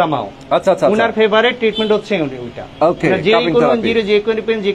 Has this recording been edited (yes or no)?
no